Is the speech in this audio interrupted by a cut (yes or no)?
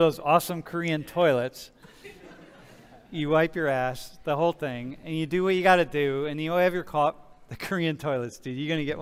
no